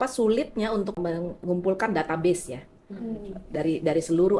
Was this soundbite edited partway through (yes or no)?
yes